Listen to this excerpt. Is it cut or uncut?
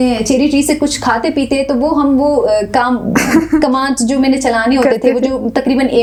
uncut